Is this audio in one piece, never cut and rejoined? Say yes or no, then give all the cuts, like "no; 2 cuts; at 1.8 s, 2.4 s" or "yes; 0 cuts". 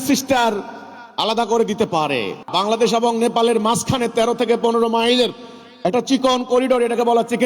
no; 1 cut; at 2.4 s